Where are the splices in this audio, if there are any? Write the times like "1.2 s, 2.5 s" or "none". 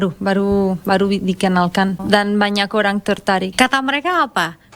2.0 s, 3.5 s